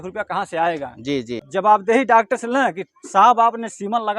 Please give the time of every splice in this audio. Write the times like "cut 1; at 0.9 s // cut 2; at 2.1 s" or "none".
cut 1; at 1.4 s

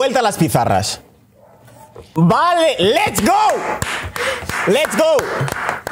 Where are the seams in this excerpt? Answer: cut 1; at 1.4 s

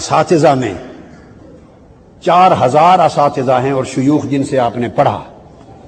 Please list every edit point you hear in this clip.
none

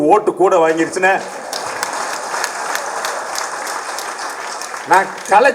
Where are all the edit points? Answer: none

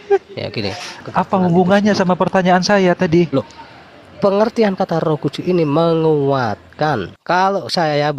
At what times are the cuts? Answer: cut 1; at 1.1 s // cut 2; at 7.1 s

